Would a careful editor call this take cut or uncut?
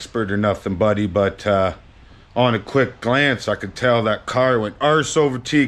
uncut